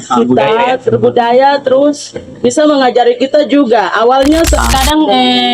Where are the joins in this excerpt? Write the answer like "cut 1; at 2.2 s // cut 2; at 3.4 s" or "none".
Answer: cut 1; at 4.5 s

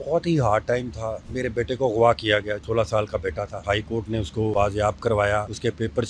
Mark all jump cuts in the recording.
cut 1; at 1.3 s // cut 2; at 4.5 s

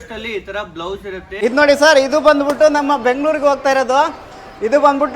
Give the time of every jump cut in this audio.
cut 1; at 1.4 s

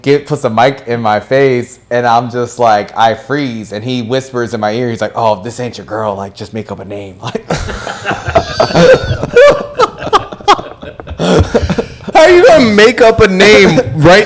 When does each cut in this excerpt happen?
none

